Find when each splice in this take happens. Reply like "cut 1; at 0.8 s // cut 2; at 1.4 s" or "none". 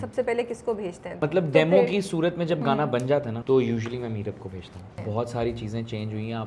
cut 1; at 1.2 s // cut 2; at 3.3 s // cut 3; at 5.0 s